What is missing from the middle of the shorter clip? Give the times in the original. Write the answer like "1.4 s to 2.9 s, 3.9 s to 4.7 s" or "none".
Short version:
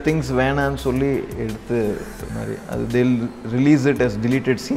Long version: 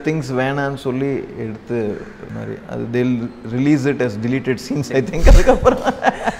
none